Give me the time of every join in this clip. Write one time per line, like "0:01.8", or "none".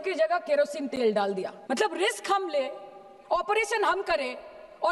0:01.5